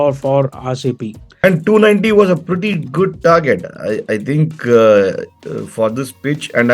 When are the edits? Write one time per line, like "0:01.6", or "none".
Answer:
0:01.4